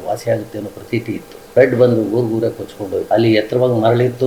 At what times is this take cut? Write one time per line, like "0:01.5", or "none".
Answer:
0:01.5
0:03.1

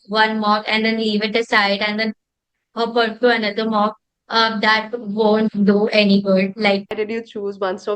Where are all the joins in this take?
0:06.9

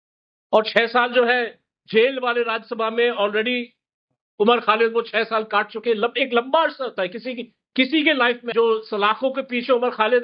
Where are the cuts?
0:08.5

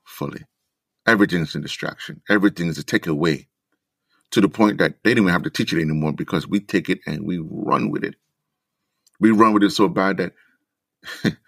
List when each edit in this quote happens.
none

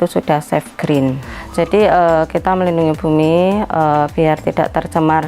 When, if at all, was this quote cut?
0:01.3

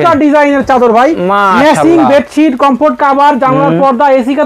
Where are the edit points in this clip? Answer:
none

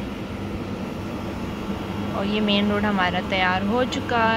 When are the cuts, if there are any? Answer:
none

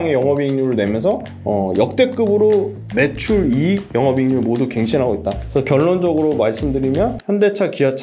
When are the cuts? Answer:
0:01.3
0:02.8
0:03.9
0:05.4
0:07.2

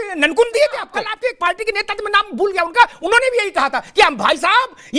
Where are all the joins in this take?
0:01.0

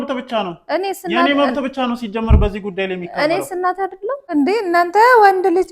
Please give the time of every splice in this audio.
0:04.2

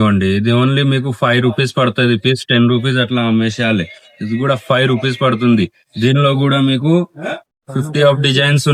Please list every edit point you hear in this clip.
none

